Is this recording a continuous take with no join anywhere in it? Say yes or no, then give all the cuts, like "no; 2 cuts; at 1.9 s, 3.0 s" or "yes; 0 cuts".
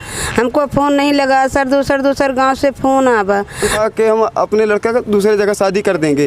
no; 1 cut; at 3.7 s